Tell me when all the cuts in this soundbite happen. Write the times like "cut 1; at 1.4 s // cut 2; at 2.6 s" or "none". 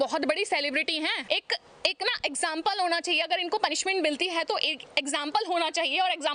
cut 1; at 1.2 s